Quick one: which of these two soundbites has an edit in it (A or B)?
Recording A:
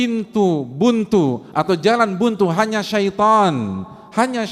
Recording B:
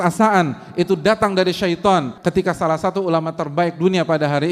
B